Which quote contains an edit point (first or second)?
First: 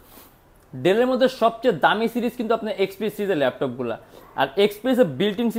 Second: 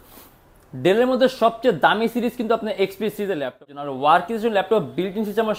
second